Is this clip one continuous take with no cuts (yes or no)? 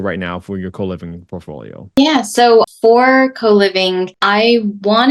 yes